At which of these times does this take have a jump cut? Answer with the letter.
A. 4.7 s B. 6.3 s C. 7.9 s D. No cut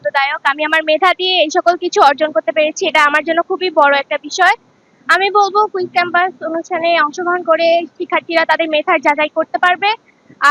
D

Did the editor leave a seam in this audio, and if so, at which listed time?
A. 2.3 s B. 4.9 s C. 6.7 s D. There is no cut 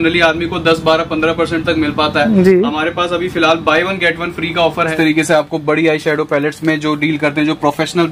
B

